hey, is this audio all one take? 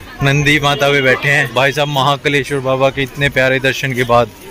no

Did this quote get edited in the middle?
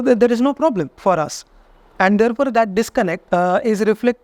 yes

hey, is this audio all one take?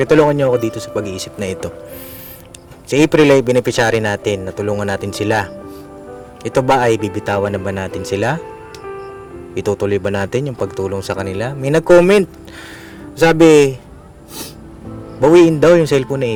yes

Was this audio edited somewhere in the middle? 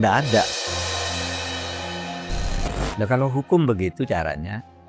yes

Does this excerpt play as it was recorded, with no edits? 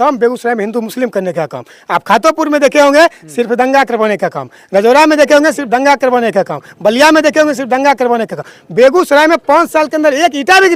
yes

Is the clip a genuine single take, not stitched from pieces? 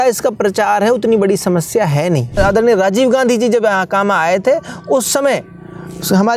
no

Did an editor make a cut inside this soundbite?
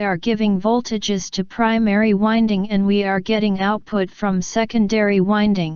no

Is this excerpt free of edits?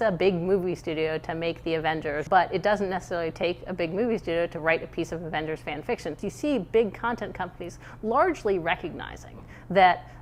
no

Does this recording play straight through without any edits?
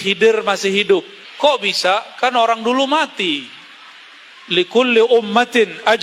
no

